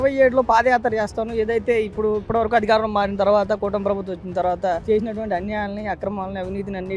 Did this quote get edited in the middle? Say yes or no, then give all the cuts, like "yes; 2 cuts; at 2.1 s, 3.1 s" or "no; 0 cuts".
no; 0 cuts